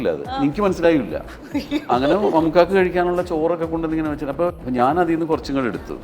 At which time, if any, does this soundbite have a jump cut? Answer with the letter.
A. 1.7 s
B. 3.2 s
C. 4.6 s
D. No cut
C